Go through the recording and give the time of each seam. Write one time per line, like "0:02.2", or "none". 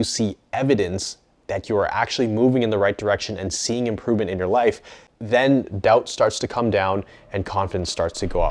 none